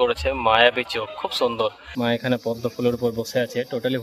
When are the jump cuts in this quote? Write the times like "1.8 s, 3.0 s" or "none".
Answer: 1.8 s